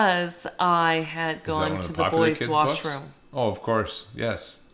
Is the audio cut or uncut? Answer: uncut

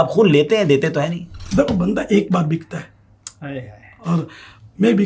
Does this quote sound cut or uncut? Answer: cut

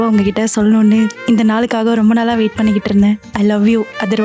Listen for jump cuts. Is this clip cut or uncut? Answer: cut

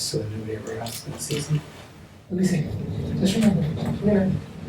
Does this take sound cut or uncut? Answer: cut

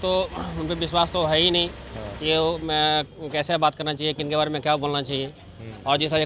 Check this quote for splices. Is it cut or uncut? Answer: uncut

